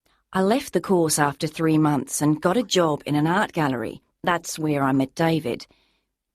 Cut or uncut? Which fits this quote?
uncut